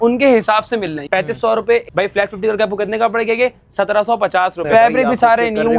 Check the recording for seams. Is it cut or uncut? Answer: cut